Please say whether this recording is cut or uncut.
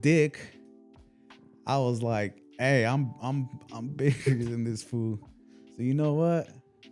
uncut